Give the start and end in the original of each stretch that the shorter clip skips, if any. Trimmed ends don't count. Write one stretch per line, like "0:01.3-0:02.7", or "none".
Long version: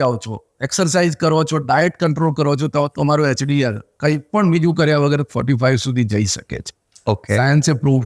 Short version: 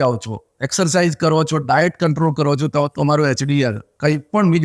none

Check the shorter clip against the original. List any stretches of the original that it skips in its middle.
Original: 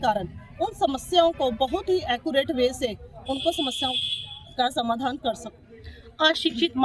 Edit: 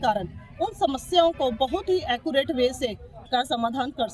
0:03.1-0:04.4

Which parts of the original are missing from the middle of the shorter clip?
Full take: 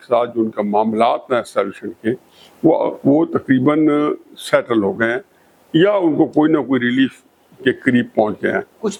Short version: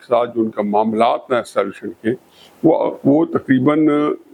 none

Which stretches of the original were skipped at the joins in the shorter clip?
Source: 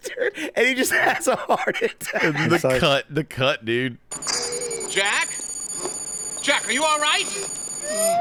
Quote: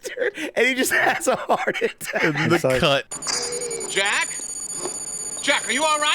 0:03.1-0:04.1

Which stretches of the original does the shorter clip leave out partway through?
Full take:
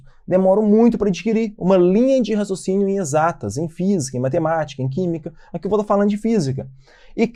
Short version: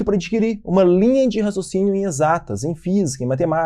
none

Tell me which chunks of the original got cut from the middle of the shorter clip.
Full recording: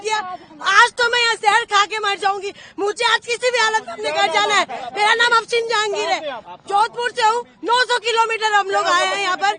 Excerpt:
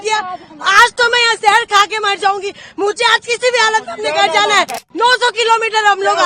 0:04.8-0:07.5

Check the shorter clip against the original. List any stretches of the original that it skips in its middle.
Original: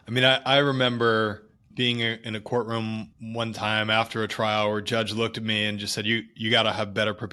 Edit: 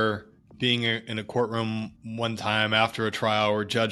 none

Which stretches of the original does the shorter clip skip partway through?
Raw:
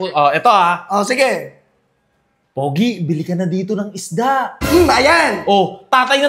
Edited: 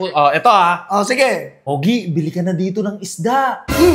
0:01.5-0:02.5

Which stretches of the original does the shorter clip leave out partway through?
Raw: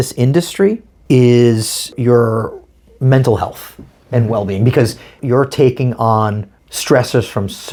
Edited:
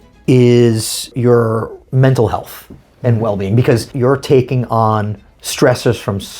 0:02.6-0:02.9
0:05.0-0:05.2

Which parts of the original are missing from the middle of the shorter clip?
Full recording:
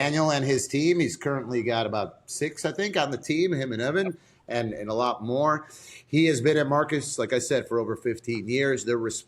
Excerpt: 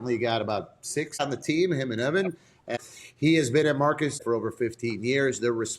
0:02.6-0:03.0
0:04.5-0:05.6
0:07.1-0:07.7

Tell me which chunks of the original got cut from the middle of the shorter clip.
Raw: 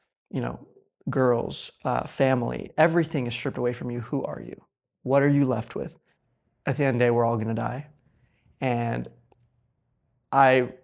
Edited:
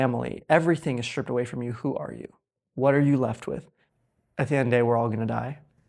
none

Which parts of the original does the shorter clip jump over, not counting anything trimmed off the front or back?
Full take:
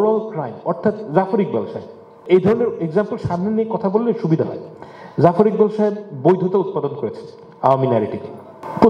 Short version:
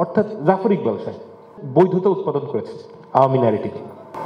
0:02.2-0:06.0

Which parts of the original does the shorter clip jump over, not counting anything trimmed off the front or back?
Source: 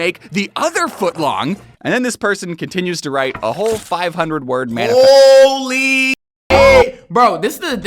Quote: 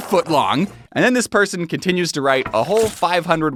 none

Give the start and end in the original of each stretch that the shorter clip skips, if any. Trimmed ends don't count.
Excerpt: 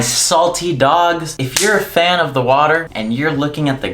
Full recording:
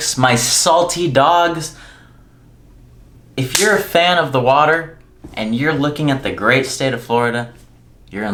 0:01.7-0:03.4
0:04.9-0:05.3

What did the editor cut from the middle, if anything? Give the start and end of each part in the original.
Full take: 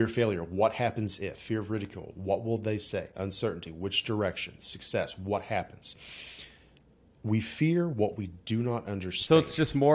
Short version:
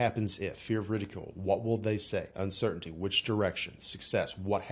none

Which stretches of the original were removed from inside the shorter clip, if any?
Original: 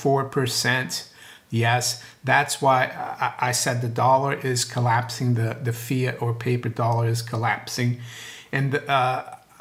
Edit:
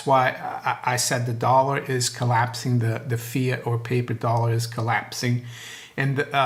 none

